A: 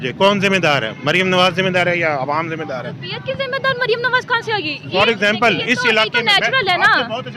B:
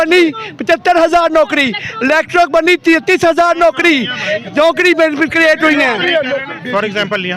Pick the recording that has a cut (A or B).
B